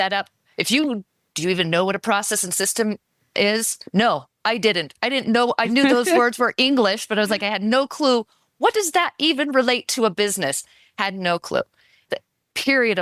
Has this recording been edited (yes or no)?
yes